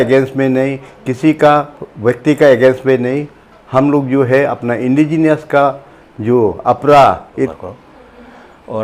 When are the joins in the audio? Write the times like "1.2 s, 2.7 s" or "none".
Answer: 7.3 s